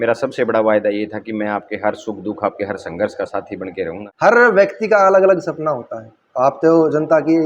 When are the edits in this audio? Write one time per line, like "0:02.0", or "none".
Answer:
0:04.1